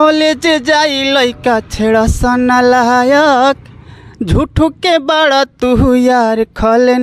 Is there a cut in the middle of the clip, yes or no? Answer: no